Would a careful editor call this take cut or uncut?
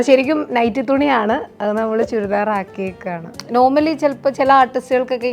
cut